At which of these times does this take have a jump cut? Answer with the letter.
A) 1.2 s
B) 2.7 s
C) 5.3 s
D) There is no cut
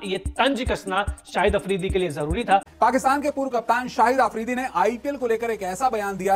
B